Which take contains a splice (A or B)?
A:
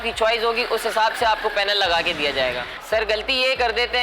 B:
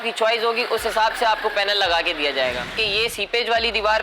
B